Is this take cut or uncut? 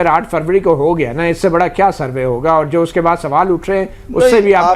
uncut